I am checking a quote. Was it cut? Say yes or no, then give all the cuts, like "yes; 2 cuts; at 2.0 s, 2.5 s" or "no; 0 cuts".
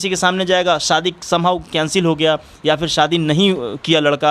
no; 0 cuts